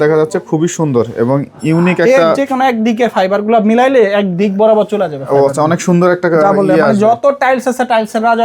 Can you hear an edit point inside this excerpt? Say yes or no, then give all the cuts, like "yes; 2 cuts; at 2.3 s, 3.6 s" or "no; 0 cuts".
no; 0 cuts